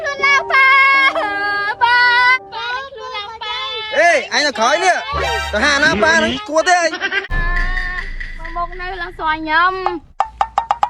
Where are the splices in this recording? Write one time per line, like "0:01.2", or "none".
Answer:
0:07.3